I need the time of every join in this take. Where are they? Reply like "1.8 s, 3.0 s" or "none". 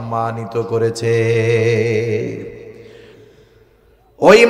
3.2 s

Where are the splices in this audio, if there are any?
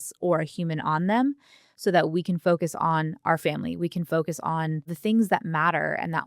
4.9 s

